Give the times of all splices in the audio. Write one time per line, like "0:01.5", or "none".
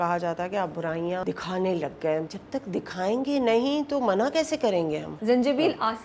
0:01.2
0:02.3
0:05.1